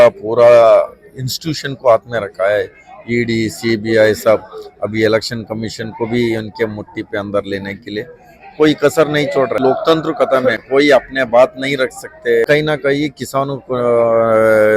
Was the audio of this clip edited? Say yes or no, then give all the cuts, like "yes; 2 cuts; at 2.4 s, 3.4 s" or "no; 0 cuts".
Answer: yes; 2 cuts; at 9.6 s, 12.4 s